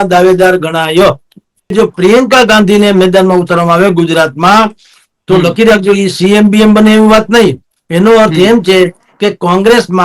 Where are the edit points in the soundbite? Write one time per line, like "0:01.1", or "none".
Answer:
0:01.7